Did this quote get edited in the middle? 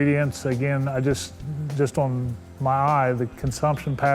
no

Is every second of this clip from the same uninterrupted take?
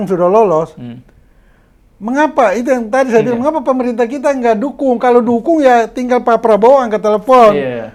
yes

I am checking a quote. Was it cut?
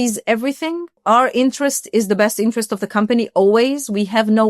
yes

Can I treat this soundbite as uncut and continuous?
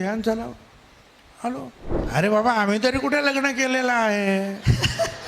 no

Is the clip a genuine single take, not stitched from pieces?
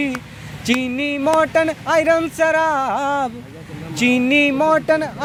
yes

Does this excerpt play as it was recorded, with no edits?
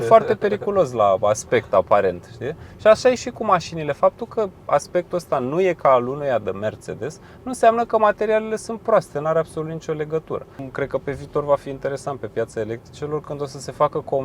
no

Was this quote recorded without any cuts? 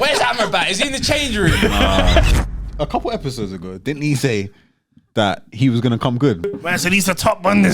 no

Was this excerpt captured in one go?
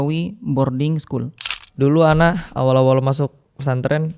no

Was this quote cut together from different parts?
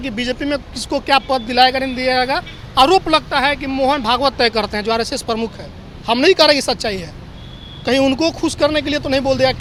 no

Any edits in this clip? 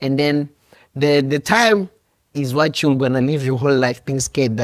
no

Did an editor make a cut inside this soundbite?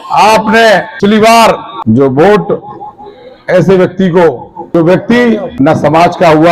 yes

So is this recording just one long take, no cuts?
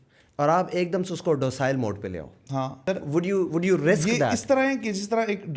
no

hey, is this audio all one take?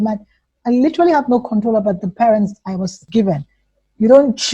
no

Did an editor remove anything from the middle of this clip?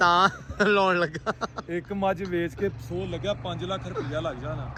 no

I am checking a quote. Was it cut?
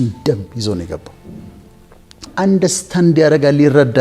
yes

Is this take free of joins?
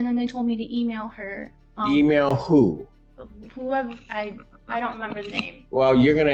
yes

